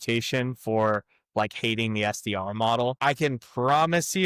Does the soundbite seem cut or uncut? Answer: cut